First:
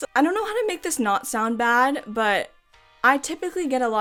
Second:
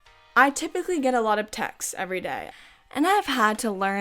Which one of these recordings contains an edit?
second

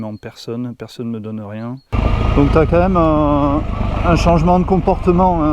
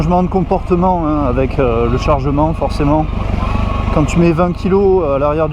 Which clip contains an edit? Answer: first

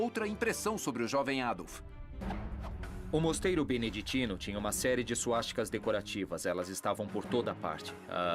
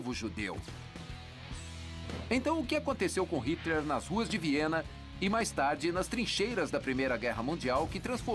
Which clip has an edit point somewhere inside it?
second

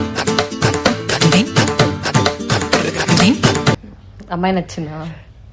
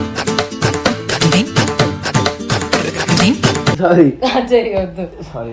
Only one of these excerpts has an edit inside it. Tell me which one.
first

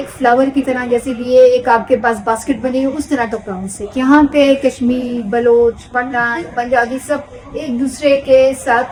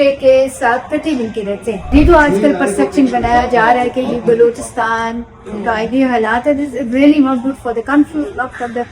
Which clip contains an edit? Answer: second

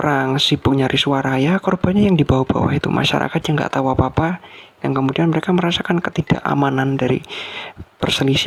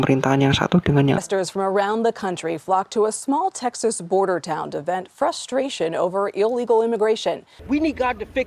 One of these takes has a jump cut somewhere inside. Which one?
second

